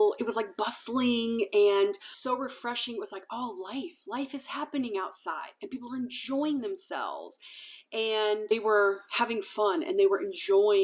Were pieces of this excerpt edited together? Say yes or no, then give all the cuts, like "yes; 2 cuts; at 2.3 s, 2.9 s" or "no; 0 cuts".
yes; 2 cuts; at 2.1 s, 8.5 s